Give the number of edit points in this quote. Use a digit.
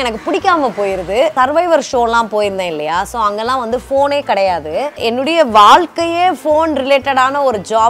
2